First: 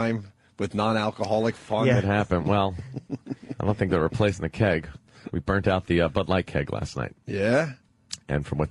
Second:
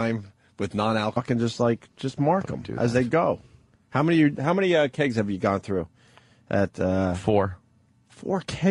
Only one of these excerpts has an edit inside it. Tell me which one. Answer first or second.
first